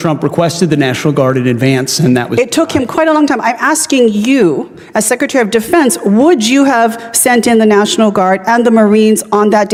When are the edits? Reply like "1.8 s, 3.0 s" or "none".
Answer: none